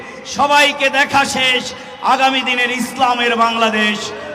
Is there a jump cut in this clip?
no; 0 cuts

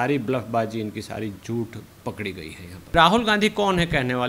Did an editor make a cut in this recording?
yes; 1 cut; at 2.9 s

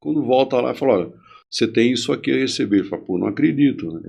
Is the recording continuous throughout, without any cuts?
yes; 0 cuts

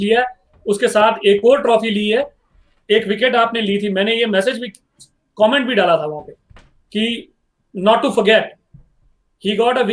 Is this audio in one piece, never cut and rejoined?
yes; 0 cuts

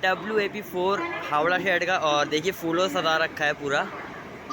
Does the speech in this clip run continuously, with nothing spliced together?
yes; 0 cuts

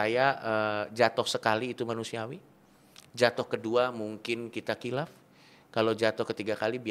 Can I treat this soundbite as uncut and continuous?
yes; 0 cuts

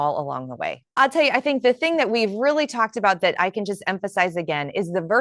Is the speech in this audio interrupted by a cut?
yes; 1 cut; at 0.9 s

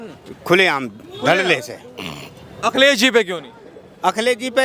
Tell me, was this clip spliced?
no; 0 cuts

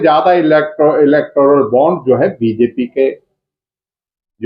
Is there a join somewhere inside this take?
no; 0 cuts

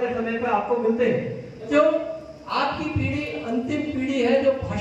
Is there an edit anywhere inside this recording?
yes; 1 cut; at 1.7 s

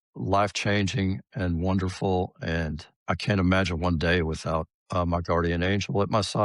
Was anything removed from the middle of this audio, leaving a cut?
yes; 2 cuts; at 2.9 s, 4.8 s

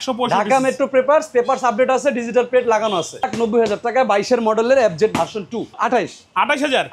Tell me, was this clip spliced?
yes; 2 cuts; at 3.3 s, 5.7 s

